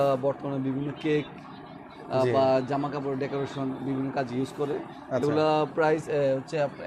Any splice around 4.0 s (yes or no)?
no